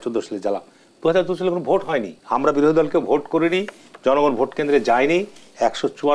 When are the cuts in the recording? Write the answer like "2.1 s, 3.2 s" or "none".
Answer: 2.2 s